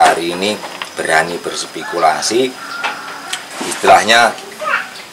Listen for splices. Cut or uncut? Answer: uncut